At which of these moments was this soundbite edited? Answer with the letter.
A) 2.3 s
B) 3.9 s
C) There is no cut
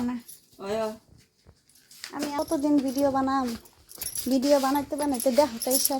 A